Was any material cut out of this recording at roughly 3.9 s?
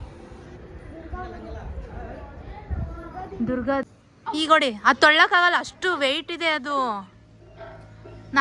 yes; 1 cut; at 3.9 s

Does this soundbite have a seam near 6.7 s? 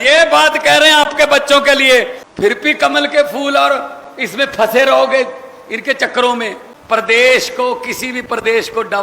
yes; 2 cuts; at 2.2 s, 6.7 s

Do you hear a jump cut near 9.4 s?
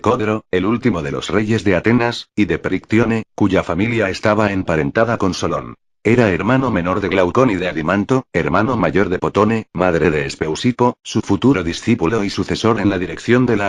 no; 1 cut; at 10.8 s

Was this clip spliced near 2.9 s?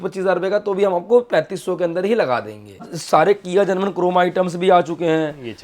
yes; 1 cut; at 2.9 s

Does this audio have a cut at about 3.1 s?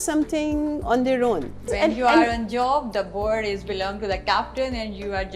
no; 1 cut; at 1.7 s

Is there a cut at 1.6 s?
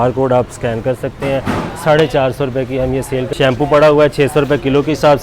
no; 1 cut; at 3.3 s

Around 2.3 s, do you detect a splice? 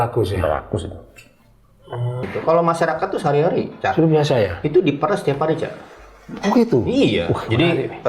yes; 1 cut; at 2.3 s

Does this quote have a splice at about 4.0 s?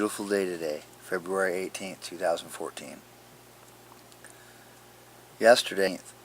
no; 1 cut; at 0.9 s

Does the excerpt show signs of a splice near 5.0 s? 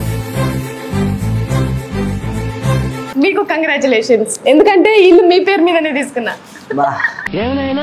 no; 1 cut; at 3.0 s

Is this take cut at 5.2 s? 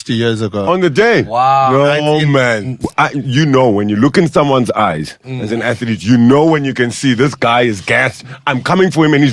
no; 1 cut; at 2.7 s

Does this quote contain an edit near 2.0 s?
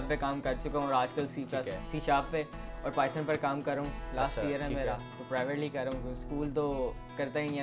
no; 1 cut; at 4.0 s

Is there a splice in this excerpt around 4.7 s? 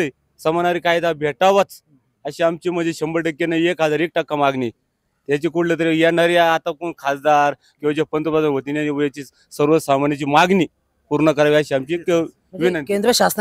no; 0 cuts

